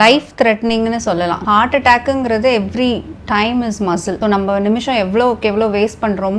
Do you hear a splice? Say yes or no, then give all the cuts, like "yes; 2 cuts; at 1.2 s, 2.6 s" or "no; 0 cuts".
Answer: yes; 2 cuts; at 1.4 s, 4.2 s